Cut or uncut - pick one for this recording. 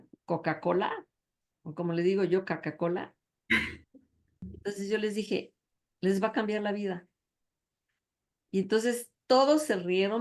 cut